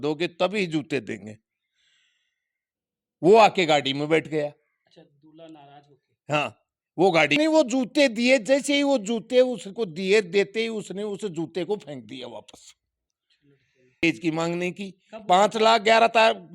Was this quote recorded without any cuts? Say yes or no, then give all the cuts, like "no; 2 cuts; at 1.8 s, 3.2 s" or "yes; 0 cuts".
no; 2 cuts; at 7.4 s, 14.0 s